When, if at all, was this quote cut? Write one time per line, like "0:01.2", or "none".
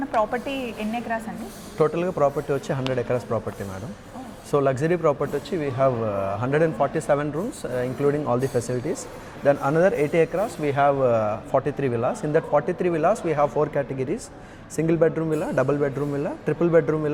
none